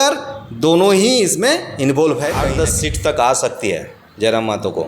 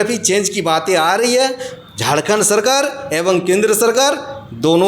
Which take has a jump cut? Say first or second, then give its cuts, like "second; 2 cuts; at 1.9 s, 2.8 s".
first; 1 cut; at 2.4 s